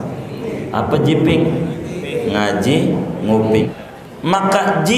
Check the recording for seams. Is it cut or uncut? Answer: cut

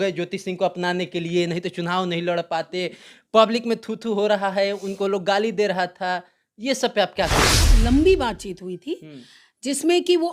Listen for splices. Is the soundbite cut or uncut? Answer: cut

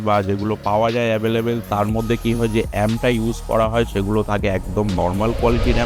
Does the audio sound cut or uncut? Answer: uncut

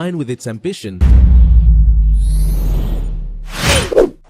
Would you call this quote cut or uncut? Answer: cut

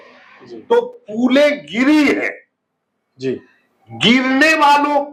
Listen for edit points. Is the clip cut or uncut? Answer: uncut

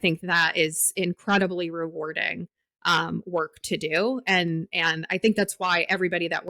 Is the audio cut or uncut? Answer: uncut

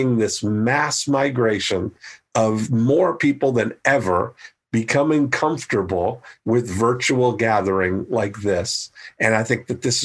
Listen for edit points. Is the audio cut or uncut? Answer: cut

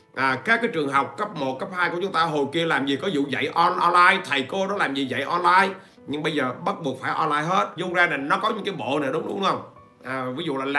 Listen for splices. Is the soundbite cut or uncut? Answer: cut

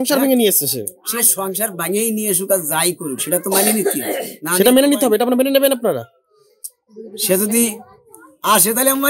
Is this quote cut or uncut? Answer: uncut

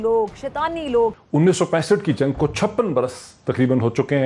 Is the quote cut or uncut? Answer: cut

